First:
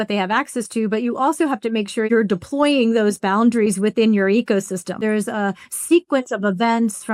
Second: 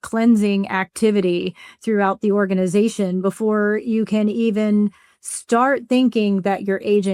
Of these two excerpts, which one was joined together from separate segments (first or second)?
first